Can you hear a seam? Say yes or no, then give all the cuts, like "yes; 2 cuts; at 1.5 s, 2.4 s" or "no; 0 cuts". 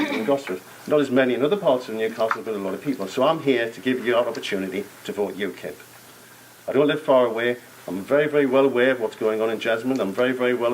yes; 1 cut; at 9.1 s